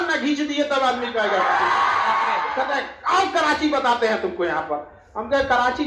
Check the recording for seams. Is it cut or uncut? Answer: cut